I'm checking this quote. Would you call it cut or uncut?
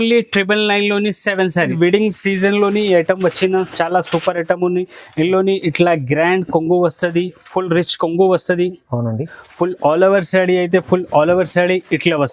cut